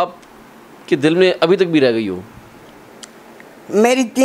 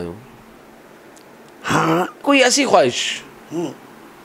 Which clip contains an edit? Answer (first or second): second